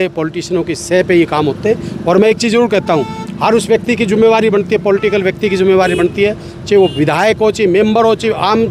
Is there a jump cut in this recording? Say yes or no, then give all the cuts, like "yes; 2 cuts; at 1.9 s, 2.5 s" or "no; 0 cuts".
no; 0 cuts